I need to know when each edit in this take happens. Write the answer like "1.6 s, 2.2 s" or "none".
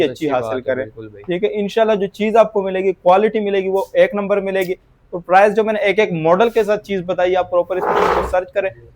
none